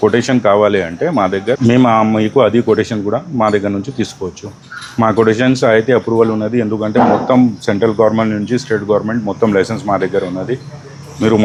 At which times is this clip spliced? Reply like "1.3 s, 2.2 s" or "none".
none